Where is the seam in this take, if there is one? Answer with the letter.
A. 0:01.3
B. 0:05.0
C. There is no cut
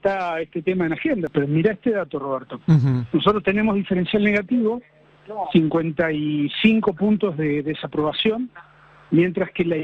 A